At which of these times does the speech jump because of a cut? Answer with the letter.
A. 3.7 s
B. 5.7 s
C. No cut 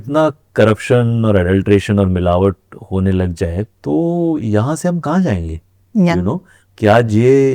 C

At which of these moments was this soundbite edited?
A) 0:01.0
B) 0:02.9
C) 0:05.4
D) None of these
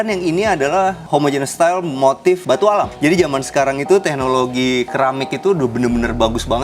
B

